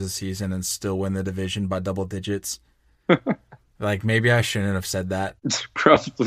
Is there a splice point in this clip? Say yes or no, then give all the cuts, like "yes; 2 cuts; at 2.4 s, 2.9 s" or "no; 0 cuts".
yes; 1 cut; at 5.3 s